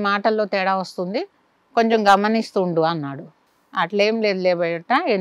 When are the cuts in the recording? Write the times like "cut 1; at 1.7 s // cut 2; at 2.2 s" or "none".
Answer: none